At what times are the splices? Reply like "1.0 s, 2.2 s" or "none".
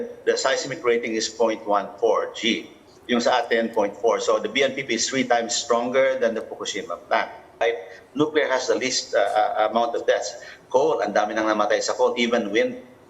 7.6 s